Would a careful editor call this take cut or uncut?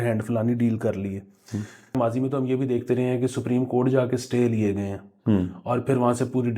cut